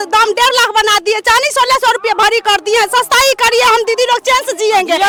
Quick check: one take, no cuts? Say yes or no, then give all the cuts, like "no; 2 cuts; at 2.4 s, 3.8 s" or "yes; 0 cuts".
yes; 0 cuts